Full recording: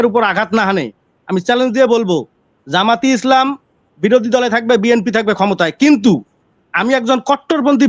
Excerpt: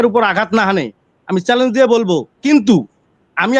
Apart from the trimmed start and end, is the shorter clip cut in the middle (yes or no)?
yes